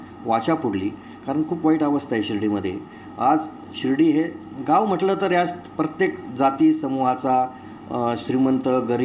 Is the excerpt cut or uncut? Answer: uncut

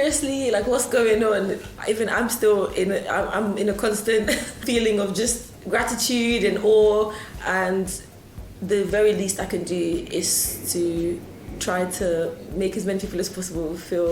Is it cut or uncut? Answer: cut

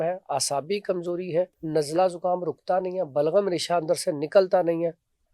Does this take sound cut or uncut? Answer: cut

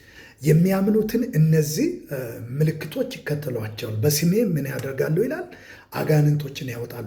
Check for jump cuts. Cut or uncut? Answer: uncut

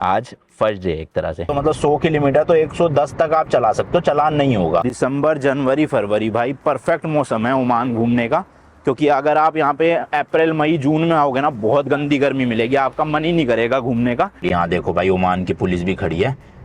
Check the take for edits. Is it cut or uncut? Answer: cut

